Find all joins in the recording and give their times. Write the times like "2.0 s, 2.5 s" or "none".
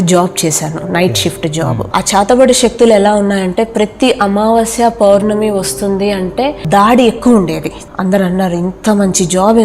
1.9 s, 6.6 s, 7.8 s